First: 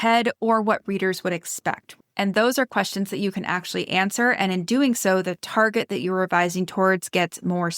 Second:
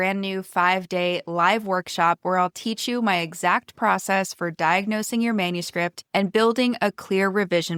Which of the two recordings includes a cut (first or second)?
first